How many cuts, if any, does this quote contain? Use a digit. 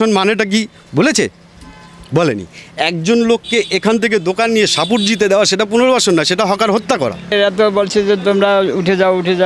1